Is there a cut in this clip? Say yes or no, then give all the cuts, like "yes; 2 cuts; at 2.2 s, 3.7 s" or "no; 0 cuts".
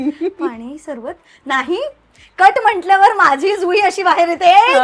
no; 0 cuts